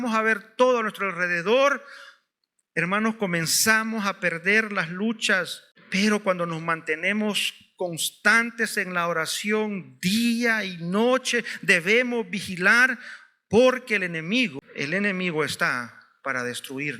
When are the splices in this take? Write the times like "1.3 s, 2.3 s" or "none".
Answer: 14.6 s